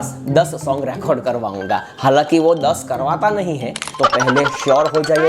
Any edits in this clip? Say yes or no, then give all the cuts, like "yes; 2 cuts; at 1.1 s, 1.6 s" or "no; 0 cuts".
yes; 1 cut; at 3.8 s